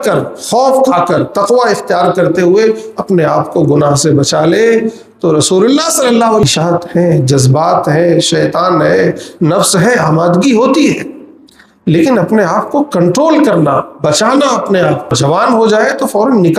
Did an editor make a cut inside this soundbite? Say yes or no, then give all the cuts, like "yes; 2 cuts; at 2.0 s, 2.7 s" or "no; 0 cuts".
yes; 2 cuts; at 6.4 s, 15.1 s